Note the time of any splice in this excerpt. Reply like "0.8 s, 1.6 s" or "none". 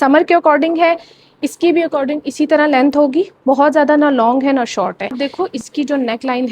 5.2 s